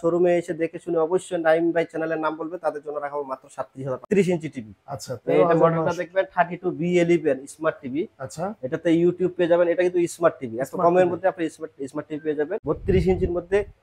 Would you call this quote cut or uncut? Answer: cut